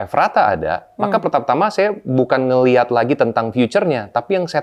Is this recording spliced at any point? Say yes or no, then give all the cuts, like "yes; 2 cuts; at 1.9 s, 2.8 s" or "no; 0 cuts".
no; 0 cuts